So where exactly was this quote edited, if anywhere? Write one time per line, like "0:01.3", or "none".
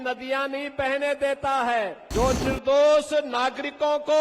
0:02.0